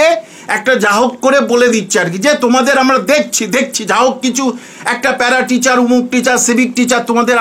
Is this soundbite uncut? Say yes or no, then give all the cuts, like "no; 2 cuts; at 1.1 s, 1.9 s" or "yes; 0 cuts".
yes; 0 cuts